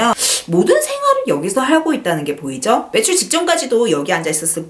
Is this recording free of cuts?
yes; 0 cuts

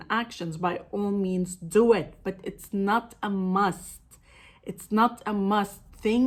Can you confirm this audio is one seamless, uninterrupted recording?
yes; 0 cuts

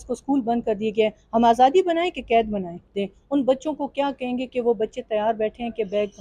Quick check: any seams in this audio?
yes; 1 cut; at 2.9 s

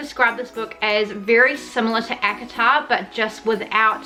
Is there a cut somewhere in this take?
no; 0 cuts

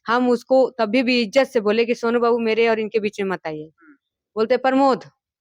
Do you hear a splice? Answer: no; 0 cuts

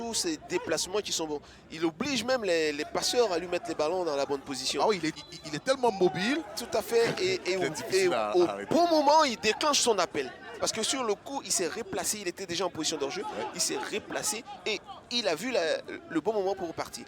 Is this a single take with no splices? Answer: no; 2 cuts; at 5.1 s, 10.6 s

